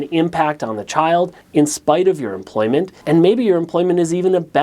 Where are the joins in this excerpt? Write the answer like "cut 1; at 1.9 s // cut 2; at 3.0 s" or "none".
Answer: cut 1; at 1.4 s // cut 2; at 3.0 s